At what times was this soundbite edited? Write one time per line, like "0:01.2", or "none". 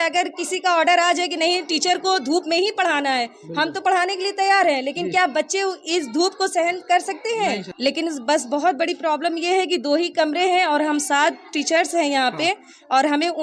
0:07.7

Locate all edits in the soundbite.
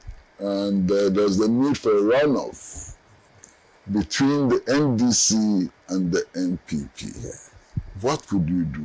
none

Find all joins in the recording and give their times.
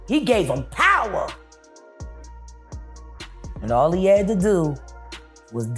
0:01.4
0:03.6

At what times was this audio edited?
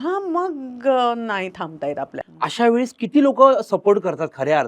0:02.2

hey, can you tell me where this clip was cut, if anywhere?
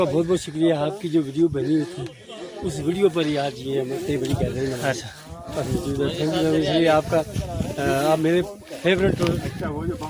none

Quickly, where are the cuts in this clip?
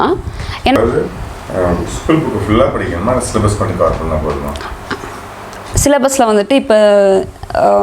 0:00.8
0:05.3

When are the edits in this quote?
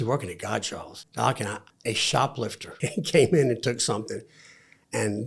0:01.0
0:01.6
0:02.7

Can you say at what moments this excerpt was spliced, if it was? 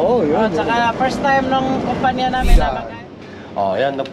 0:02.5

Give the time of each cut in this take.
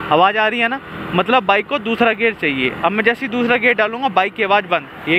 none

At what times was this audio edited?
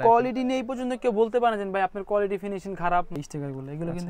0:03.1

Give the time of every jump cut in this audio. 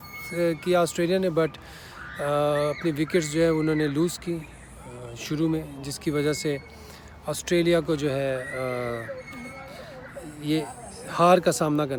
none

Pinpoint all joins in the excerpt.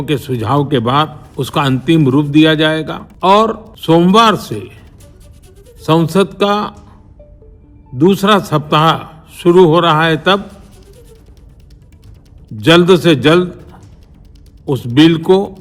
0:01.2
0:03.0
0:03.7

